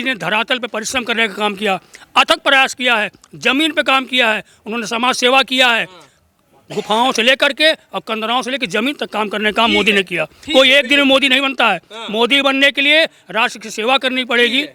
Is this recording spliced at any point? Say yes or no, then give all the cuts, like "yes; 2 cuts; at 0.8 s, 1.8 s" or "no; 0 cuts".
no; 0 cuts